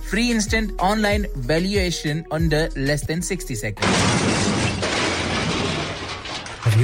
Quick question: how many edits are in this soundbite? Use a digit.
1